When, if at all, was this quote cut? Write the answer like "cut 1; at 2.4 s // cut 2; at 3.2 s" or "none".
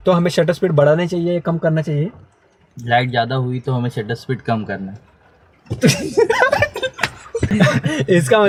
none